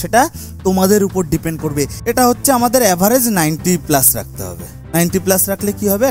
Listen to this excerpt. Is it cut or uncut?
cut